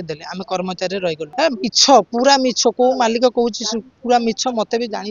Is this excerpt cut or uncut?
cut